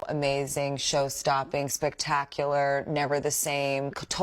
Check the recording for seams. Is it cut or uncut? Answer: uncut